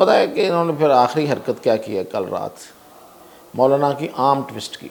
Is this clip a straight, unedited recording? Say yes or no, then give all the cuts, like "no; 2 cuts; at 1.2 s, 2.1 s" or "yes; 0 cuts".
yes; 0 cuts